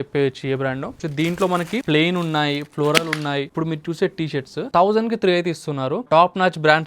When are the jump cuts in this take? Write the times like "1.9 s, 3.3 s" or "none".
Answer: 1.0 s, 1.8 s, 3.5 s, 6.1 s

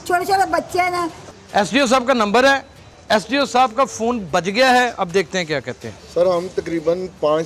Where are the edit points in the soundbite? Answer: 1.2 s, 6.0 s

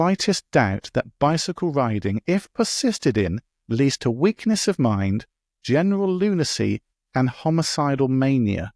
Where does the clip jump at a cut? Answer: none

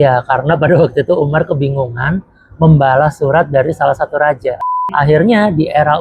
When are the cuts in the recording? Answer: 4.6 s

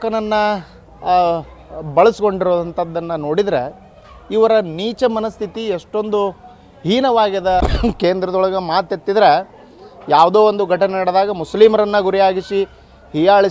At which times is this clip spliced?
7.6 s

